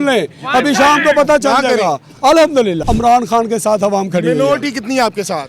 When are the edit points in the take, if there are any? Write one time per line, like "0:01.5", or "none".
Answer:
0:02.8

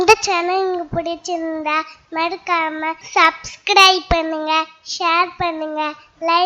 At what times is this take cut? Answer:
0:03.0

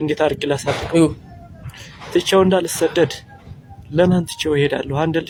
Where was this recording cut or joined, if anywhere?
none

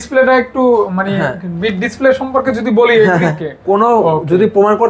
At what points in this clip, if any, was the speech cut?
0:03.5

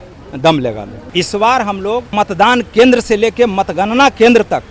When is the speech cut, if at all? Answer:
0:01.0
0:02.1

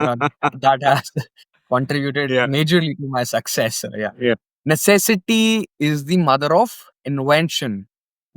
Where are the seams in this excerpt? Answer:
0:04.4

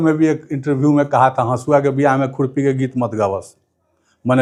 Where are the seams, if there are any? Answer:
none

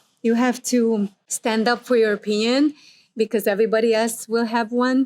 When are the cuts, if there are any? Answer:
0:01.2

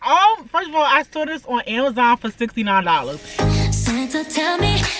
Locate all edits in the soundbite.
0:03.2

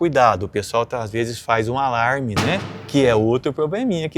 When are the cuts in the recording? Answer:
0:02.7

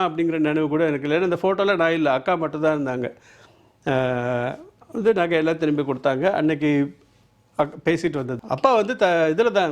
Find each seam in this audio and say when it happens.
0:08.4

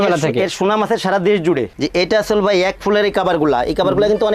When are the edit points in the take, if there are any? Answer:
0:01.7

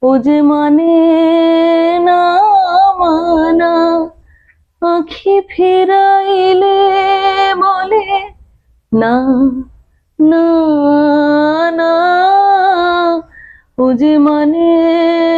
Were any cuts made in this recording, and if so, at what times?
none

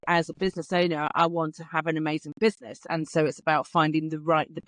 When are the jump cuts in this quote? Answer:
none

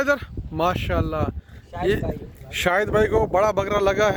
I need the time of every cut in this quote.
none

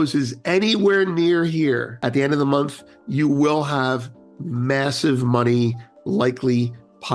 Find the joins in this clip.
0:01.9

